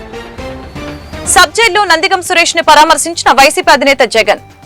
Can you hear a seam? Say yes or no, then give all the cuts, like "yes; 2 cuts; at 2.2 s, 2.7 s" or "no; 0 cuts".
yes; 1 cut; at 1.2 s